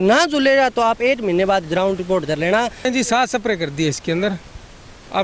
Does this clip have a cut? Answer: yes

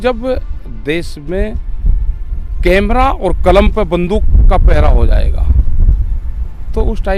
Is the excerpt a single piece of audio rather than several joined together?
yes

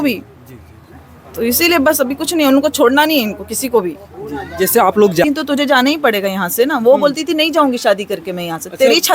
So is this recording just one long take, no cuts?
no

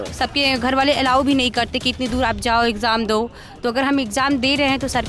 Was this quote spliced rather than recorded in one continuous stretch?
no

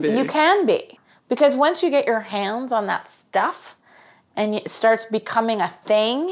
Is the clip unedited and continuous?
no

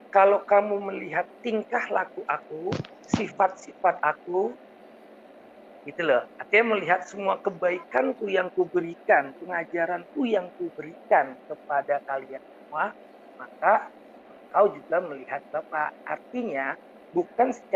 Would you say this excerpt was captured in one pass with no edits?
yes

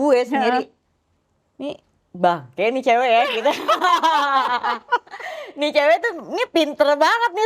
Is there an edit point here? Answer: no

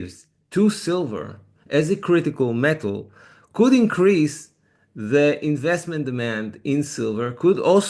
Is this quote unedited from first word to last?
yes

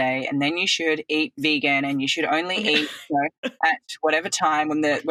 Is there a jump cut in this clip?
no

